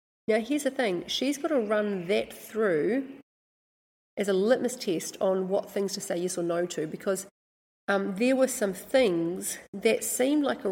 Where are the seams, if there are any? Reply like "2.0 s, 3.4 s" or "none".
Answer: none

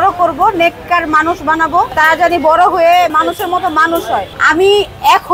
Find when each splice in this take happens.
3.1 s, 4.4 s

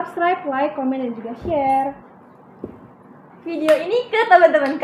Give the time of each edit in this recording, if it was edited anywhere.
none

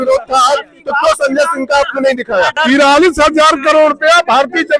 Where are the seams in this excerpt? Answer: 2.5 s

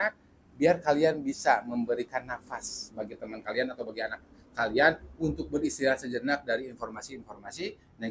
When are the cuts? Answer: none

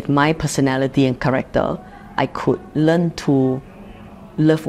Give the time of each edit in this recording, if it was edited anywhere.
none

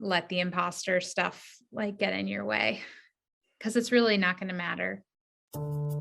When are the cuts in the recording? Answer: 5.1 s

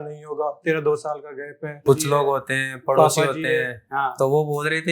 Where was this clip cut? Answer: 1.8 s

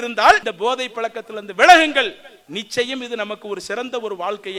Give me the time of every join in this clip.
none

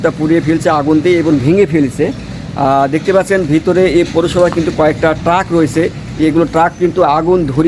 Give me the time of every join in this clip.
none

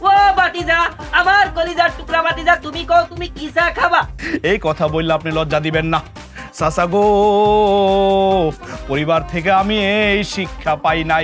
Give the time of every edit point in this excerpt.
4.1 s

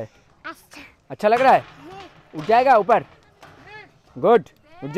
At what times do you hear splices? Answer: none

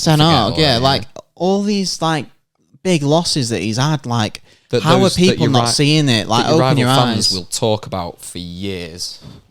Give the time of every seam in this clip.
none

